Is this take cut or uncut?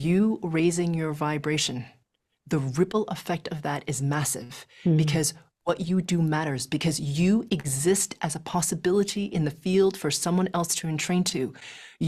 uncut